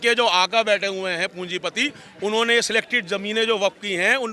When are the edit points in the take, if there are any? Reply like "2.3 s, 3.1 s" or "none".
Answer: none